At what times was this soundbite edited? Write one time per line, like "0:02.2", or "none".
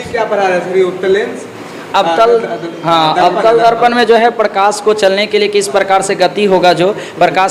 none